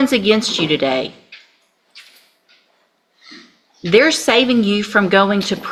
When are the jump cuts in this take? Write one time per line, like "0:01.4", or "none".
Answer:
none